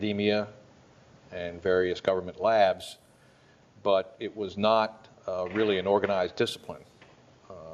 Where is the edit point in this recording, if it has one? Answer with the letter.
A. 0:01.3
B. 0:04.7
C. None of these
A